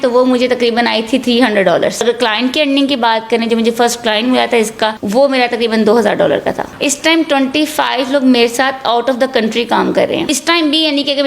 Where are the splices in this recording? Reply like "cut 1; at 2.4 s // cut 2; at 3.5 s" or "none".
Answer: cut 1; at 2.0 s // cut 2; at 5.0 s // cut 3; at 6.7 s // cut 4; at 10.3 s